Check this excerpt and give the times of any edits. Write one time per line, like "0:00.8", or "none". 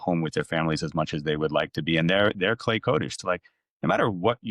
0:03.2